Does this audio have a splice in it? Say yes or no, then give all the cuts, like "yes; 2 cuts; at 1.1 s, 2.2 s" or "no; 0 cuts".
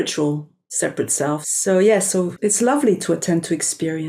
yes; 2 cuts; at 1.4 s, 2.3 s